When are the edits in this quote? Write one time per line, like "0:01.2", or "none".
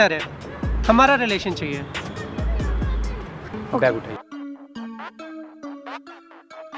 0:03.5